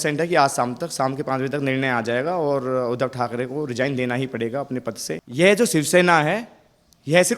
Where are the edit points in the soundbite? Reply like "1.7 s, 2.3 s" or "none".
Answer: 5.2 s